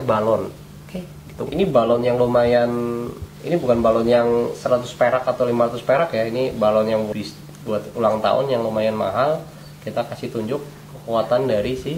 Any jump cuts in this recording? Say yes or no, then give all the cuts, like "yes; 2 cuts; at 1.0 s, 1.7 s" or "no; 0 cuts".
yes; 1 cut; at 7.1 s